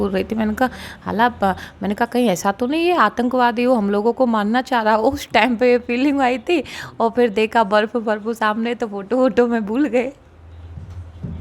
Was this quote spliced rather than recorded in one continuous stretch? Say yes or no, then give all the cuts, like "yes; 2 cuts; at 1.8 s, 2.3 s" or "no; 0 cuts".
no; 0 cuts